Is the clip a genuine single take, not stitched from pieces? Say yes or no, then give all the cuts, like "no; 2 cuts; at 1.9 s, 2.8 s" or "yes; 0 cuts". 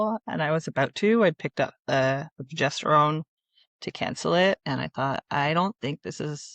yes; 0 cuts